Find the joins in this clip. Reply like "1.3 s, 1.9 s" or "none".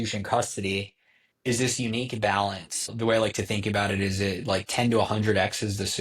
2.9 s